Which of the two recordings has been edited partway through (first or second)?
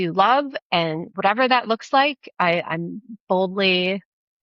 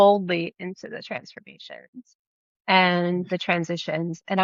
first